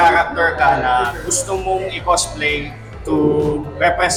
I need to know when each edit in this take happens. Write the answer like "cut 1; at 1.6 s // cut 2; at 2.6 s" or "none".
none